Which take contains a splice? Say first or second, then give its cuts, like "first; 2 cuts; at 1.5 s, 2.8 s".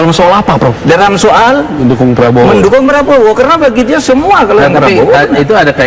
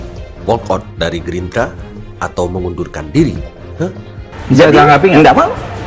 second; 1 cut; at 4.1 s